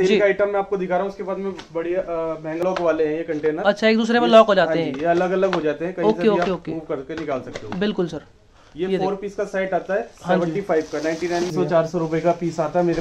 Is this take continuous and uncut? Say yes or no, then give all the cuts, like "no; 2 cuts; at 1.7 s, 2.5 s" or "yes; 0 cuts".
no; 2 cuts; at 2.6 s, 11.5 s